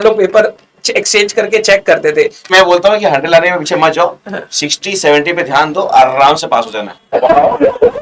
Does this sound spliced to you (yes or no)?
yes